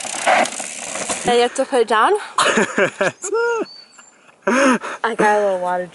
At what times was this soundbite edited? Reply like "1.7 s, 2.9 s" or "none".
1.2 s